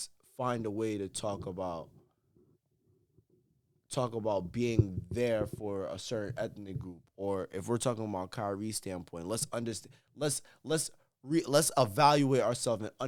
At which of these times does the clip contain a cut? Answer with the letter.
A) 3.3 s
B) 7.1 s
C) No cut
C